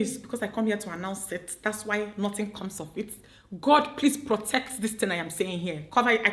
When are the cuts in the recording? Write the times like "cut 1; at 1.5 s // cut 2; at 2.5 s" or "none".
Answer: none